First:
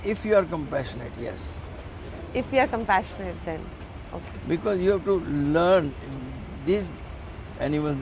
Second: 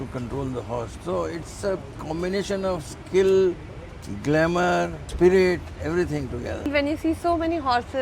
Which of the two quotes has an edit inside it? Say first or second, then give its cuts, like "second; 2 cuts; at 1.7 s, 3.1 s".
second; 2 cuts; at 5.0 s, 6.7 s